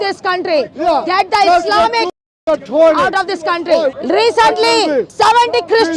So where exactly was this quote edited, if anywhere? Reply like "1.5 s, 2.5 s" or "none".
4.0 s, 5.1 s

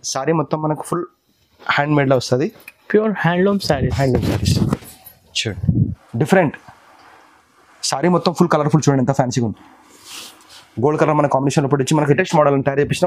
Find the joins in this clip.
6.0 s, 12.1 s

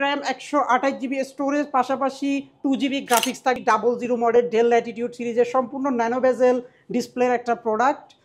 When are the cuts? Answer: 3.6 s

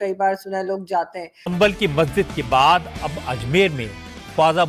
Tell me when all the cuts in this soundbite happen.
1.5 s

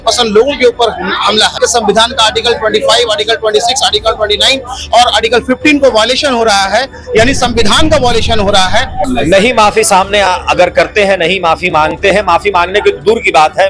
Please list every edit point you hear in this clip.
1.5 s, 9.1 s

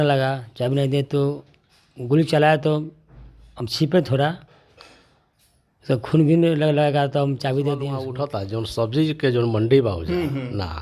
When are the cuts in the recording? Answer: 8.2 s

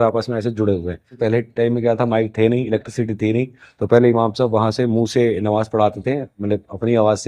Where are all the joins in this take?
1.1 s

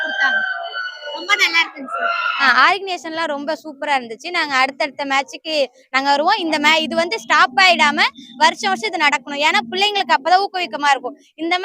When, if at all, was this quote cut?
2.3 s

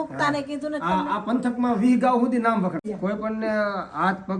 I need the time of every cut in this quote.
2.9 s

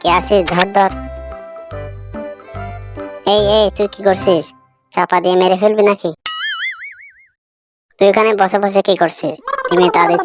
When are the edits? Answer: none

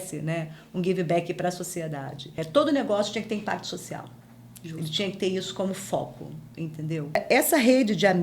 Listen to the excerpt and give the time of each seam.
2.4 s, 7.2 s

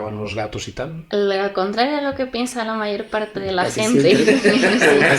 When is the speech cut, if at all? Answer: 1.0 s

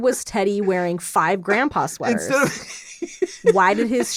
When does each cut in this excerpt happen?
none

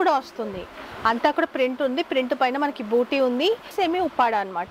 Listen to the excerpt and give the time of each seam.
3.7 s

